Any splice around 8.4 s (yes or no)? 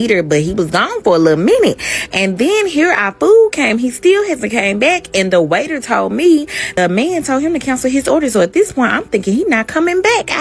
no